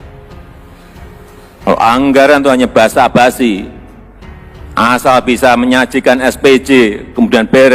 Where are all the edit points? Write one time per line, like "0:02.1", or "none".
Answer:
none